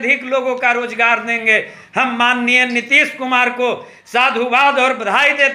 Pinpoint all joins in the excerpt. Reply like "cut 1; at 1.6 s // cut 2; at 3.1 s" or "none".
none